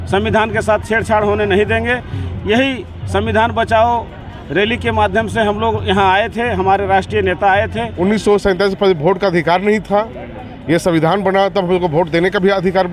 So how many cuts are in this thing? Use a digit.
1